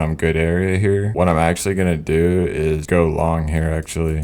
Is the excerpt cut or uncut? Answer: cut